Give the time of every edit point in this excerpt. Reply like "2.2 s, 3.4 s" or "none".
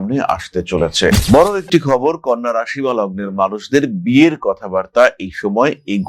1.2 s